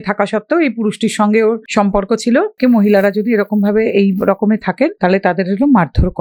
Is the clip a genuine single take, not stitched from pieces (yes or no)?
no